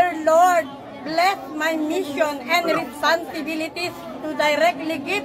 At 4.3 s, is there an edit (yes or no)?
no